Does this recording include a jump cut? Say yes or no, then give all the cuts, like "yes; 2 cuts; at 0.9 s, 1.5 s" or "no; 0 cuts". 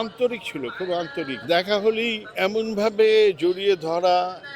yes; 2 cuts; at 1.4 s, 2.3 s